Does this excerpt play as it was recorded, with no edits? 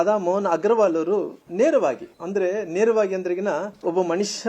yes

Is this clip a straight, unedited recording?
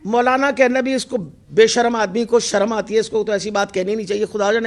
yes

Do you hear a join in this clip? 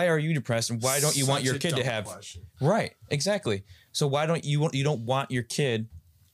no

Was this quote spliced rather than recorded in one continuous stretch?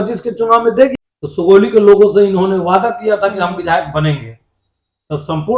yes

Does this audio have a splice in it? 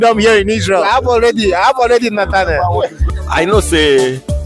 yes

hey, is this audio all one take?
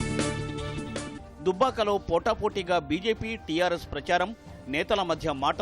no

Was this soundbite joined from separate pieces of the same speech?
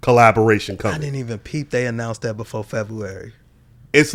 no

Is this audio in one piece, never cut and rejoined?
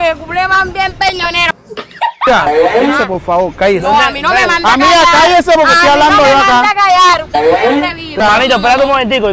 no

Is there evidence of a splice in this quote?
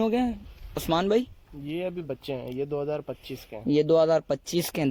no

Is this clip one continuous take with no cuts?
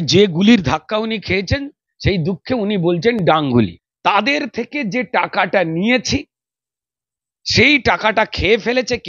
no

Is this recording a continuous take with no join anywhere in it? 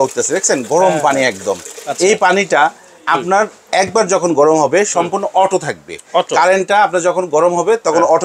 yes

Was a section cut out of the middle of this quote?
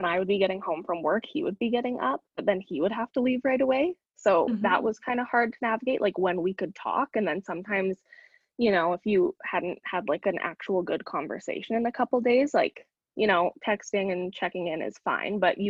no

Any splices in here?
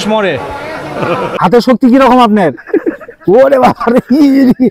yes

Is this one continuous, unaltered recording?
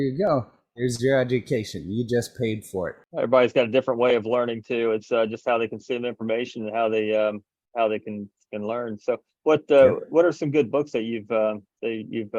no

